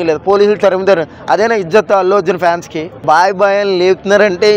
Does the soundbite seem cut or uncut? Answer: cut